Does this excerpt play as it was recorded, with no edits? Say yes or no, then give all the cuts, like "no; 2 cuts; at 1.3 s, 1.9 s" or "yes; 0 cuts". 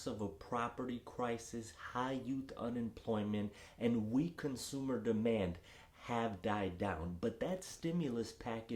yes; 0 cuts